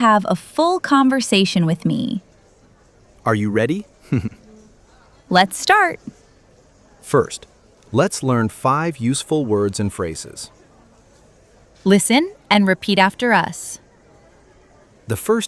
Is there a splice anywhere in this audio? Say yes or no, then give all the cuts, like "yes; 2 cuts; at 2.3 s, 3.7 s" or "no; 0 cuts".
no; 0 cuts